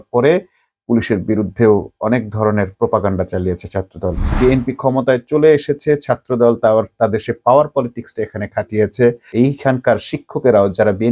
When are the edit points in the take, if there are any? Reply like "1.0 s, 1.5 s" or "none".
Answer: 4.3 s, 9.3 s

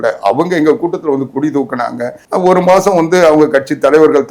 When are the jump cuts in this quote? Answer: 2.2 s

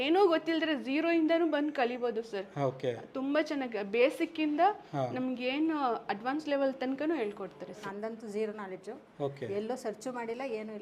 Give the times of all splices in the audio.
7.8 s

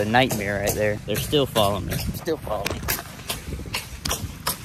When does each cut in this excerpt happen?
1.0 s, 2.1 s

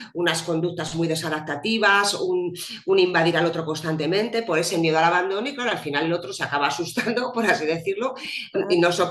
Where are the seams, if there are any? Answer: none

